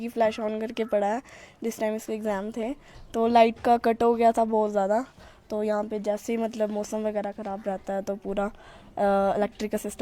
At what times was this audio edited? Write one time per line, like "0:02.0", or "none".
none